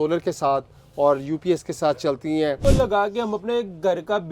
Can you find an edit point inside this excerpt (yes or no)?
yes